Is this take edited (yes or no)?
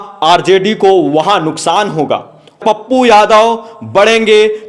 yes